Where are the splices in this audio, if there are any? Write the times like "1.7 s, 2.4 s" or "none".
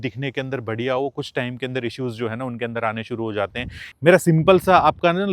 3.8 s